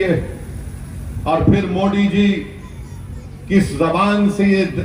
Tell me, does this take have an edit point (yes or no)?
no